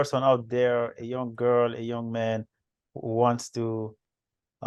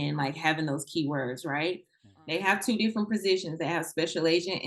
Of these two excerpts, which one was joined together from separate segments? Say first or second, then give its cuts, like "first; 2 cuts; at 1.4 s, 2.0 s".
second; 1 cut; at 2.0 s